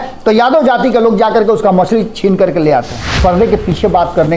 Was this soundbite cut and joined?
yes; 1 cut; at 3.0 s

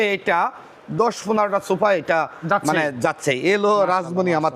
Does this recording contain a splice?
no; 0 cuts

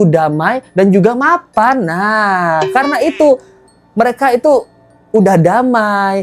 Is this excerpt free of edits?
yes; 0 cuts

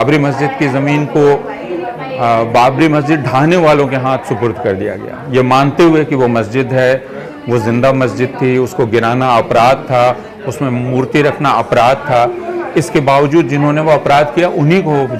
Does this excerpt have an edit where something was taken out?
no; 0 cuts

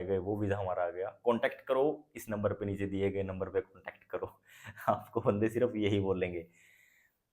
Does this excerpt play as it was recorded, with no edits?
yes; 0 cuts

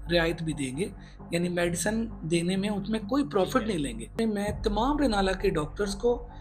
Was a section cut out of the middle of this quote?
yes; 1 cut; at 4.1 s

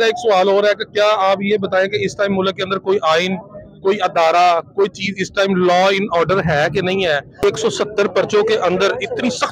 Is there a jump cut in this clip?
no; 0 cuts

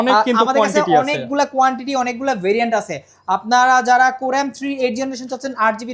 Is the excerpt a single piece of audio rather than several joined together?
yes; 0 cuts

